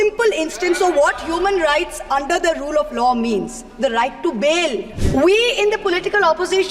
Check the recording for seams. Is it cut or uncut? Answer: cut